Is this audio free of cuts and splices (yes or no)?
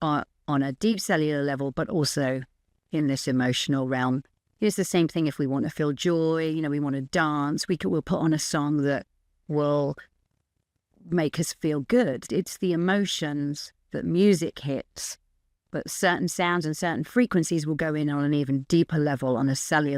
no